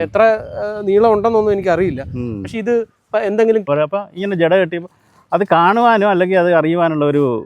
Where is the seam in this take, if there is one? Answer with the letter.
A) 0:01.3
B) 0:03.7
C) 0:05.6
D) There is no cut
B